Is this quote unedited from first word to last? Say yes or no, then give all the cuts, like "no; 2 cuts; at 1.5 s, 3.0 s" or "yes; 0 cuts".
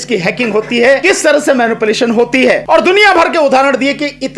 no; 2 cuts; at 1.0 s, 2.6 s